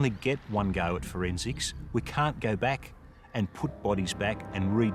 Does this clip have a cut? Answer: no; 0 cuts

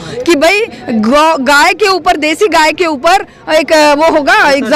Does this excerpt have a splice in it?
no; 0 cuts

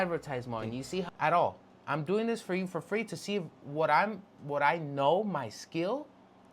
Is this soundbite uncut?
no; 1 cut; at 1.1 s

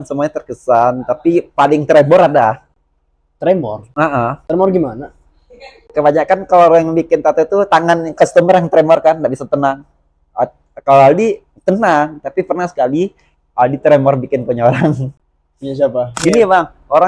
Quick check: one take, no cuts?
no; 1 cut; at 16.2 s

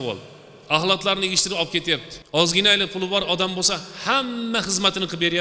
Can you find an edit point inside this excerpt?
yes; 1 cut; at 2.4 s

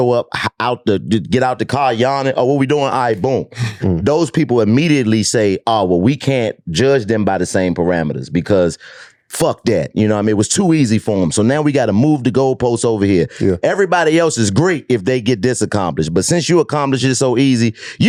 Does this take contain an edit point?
no; 0 cuts

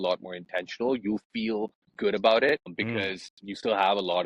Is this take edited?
yes; 2 cuts; at 1.8 s, 2.8 s

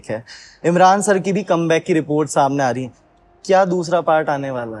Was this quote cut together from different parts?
no; 0 cuts

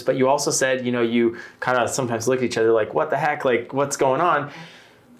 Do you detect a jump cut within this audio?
no; 0 cuts

